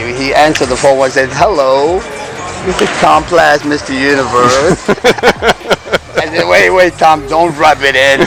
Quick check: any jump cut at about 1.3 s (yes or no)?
no